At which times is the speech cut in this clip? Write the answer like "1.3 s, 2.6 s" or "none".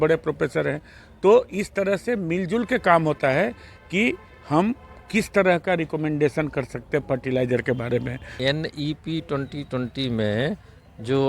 8.2 s